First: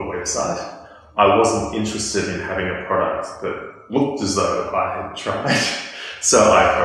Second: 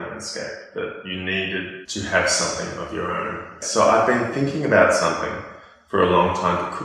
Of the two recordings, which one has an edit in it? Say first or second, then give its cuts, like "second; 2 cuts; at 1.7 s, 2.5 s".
second; 2 cuts; at 1.8 s, 3.6 s